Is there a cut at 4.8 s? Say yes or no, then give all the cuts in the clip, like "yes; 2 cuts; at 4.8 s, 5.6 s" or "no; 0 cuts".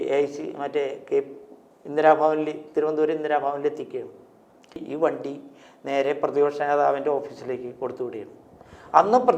yes; 1 cut; at 4.8 s